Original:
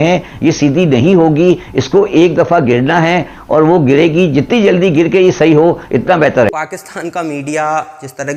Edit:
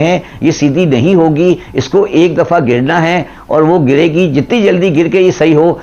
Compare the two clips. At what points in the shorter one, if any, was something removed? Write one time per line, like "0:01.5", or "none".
none